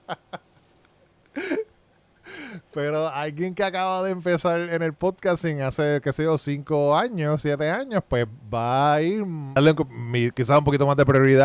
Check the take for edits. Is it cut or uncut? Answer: cut